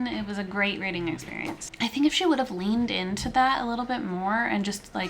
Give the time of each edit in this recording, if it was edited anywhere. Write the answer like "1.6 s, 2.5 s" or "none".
1.8 s